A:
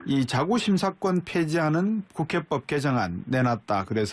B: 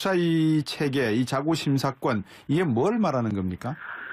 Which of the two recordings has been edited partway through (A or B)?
A